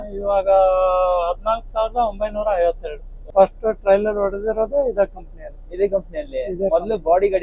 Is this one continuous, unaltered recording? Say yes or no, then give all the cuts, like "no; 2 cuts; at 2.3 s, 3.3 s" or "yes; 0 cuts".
no; 1 cut; at 3.3 s